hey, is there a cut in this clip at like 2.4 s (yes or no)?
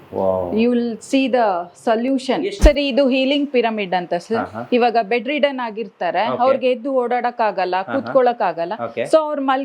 yes